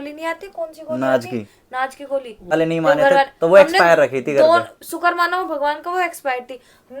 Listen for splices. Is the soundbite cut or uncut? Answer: cut